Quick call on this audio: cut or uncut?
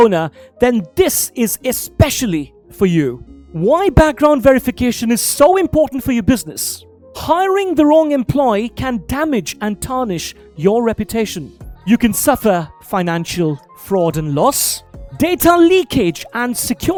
uncut